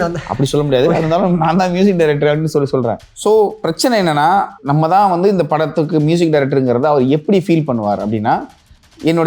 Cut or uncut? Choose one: cut